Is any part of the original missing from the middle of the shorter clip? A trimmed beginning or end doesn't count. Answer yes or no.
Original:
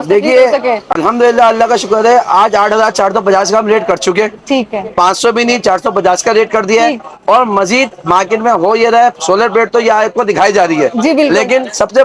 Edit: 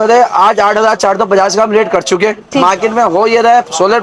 yes